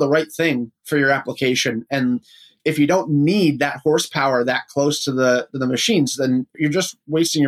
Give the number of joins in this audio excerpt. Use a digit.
2